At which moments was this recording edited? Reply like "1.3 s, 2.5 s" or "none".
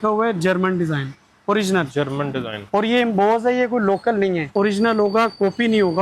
4.5 s